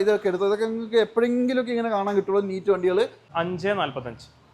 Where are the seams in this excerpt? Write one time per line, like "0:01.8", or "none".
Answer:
0:03.2